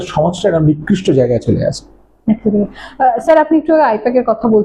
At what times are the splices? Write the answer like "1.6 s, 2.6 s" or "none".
none